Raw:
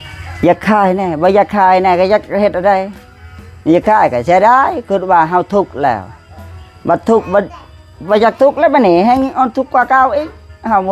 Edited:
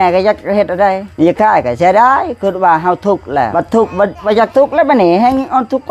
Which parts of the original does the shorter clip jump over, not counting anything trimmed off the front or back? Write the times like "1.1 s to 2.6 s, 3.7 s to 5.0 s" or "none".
2.9 s to 3.5 s, 6.0 s to 6.9 s, 7.5 s to 8.0 s